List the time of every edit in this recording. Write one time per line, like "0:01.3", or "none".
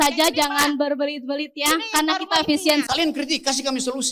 0:02.8